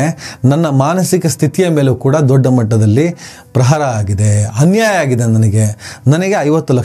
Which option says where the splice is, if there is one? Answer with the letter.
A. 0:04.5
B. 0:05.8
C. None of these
C